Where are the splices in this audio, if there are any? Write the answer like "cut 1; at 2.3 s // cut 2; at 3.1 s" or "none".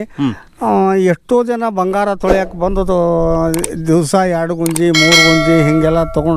none

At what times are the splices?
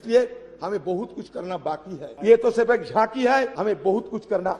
cut 1; at 2.1 s // cut 2; at 3.5 s

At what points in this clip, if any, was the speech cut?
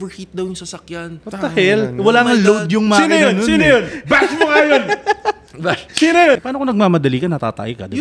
cut 1; at 6.4 s

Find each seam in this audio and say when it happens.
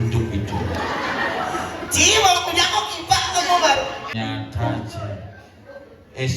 cut 1; at 4.1 s

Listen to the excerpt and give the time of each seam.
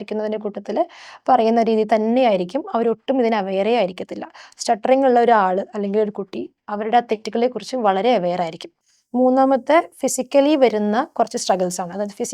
cut 1; at 8.7 s

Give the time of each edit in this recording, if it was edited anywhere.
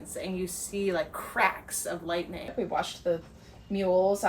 cut 1; at 2.5 s

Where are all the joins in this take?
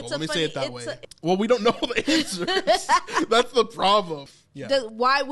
cut 1; at 1.0 s // cut 2; at 4.2 s

